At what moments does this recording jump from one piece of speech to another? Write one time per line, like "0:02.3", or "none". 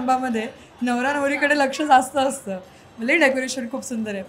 none